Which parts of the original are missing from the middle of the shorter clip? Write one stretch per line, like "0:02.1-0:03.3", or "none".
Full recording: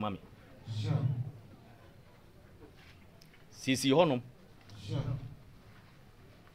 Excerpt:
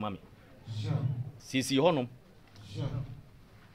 0:01.3-0:03.5